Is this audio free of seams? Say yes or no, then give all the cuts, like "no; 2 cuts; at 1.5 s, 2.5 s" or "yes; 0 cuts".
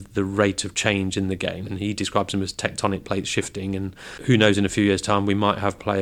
no; 2 cuts; at 1.6 s, 4.1 s